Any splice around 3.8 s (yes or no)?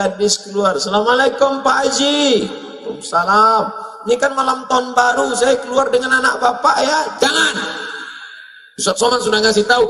no